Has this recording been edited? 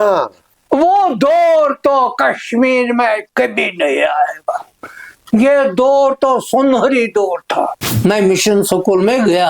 yes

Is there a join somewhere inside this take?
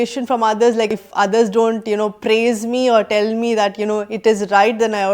yes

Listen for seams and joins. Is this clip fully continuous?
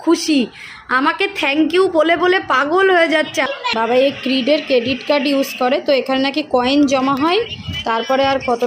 no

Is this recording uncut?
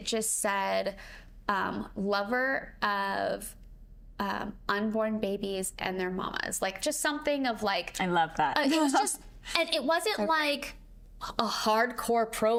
yes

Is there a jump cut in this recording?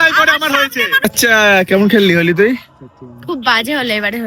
yes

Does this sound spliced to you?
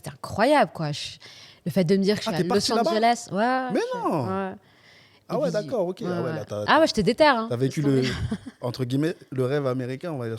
no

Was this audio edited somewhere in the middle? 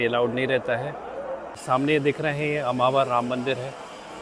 yes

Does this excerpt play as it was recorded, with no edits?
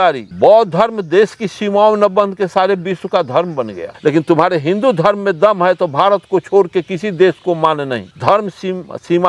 yes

